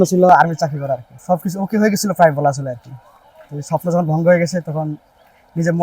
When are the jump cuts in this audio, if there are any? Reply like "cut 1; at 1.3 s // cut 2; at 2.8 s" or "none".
cut 1; at 1.1 s